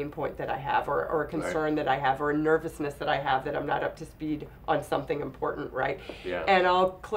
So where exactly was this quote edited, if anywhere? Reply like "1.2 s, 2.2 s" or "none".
none